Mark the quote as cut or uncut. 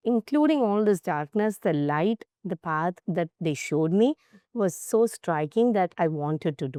uncut